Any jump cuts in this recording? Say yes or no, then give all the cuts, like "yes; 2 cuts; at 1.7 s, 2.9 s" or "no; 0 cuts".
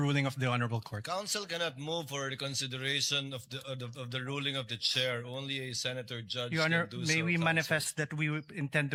no; 0 cuts